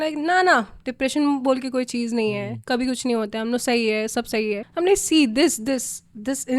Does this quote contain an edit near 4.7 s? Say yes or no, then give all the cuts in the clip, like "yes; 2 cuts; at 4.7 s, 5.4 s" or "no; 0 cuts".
yes; 1 cut; at 4.7 s